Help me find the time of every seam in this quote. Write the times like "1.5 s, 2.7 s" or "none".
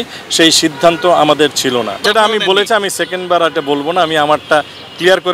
2.0 s

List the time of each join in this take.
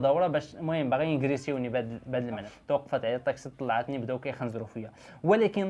2.5 s

